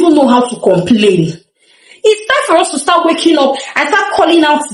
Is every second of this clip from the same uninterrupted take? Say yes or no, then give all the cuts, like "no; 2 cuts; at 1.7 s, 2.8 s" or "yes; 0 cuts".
yes; 0 cuts